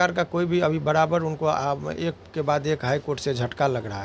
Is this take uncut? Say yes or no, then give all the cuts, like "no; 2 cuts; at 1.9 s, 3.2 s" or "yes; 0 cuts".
yes; 0 cuts